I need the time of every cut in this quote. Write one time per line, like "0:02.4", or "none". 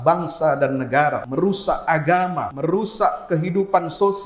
0:01.2
0:02.5